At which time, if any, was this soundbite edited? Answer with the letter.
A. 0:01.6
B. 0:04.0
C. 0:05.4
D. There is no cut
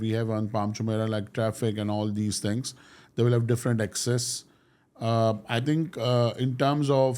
D